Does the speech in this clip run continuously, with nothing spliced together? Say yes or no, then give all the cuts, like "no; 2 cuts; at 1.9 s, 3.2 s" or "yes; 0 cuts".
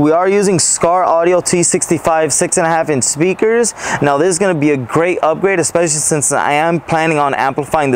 yes; 0 cuts